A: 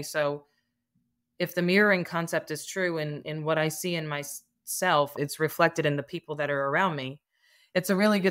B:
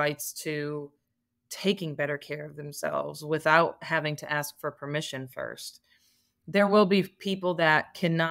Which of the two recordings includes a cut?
A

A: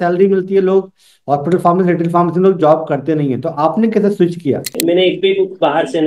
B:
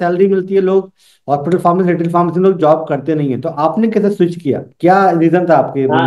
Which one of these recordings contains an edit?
A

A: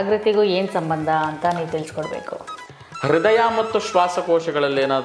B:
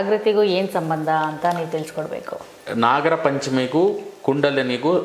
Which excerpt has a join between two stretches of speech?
A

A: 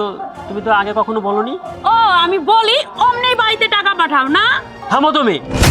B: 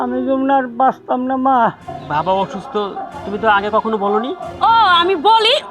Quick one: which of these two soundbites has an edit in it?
B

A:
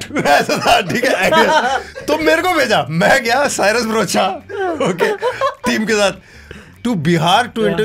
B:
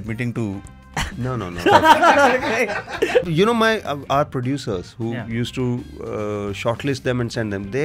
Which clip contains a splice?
B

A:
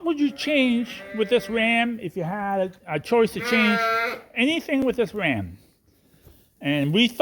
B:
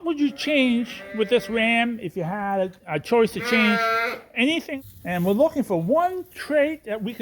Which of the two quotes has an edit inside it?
B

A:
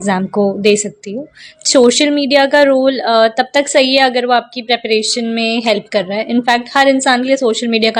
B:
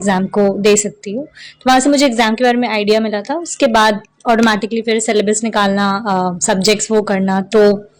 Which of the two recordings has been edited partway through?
A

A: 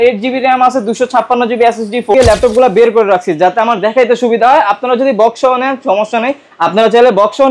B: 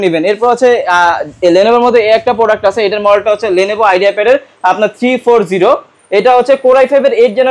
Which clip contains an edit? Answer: A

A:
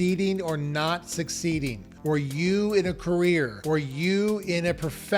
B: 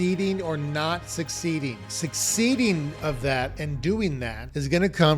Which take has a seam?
B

